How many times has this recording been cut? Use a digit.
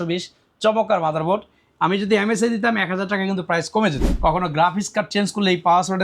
1